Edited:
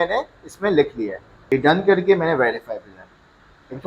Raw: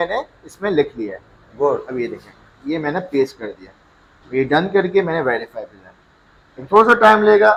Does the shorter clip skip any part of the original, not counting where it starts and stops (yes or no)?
yes